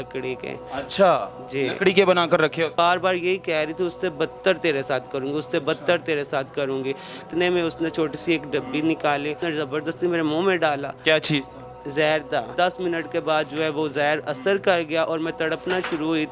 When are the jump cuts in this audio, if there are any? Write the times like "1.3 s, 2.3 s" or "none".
2.8 s, 7.3 s, 9.4 s, 12.5 s